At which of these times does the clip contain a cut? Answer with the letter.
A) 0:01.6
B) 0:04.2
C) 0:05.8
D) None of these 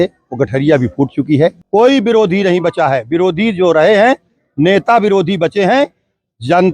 A